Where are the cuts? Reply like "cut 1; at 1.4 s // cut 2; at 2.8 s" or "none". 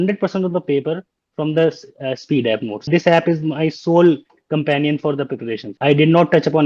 cut 1; at 2.9 s // cut 2; at 5.7 s